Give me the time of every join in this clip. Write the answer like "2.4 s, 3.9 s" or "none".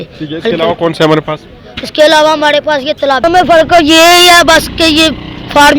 3.2 s